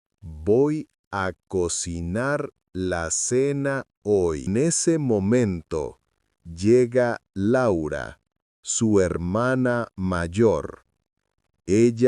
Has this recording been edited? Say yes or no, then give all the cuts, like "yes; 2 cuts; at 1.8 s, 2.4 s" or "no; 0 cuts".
yes; 1 cut; at 4.4 s